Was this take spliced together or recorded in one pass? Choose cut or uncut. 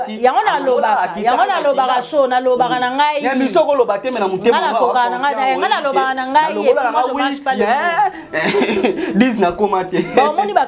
uncut